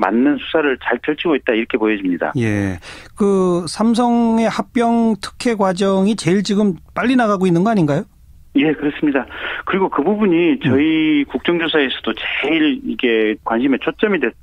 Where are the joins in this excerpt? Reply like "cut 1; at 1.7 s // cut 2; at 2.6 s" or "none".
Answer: cut 1; at 2.0 s